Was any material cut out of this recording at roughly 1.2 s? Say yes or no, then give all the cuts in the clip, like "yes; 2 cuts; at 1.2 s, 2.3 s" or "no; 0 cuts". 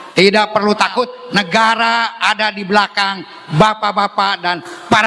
yes; 1 cut; at 1.2 s